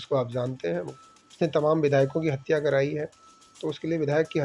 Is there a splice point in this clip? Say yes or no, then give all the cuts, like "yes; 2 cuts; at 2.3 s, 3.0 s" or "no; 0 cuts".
yes; 1 cut; at 0.9 s